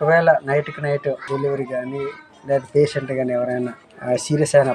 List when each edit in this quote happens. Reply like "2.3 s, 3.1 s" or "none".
1.2 s, 3.8 s